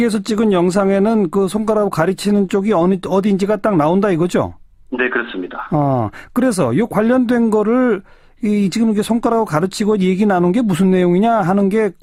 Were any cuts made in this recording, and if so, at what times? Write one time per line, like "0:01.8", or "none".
none